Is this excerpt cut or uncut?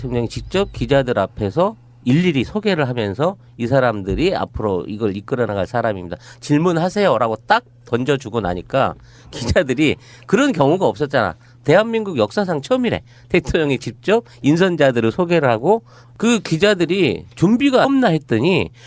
uncut